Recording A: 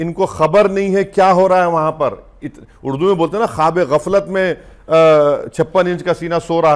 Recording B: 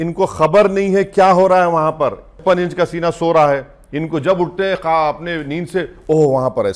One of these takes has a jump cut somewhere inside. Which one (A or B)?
B